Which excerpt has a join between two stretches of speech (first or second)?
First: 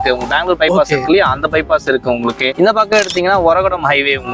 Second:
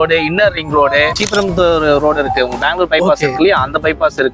second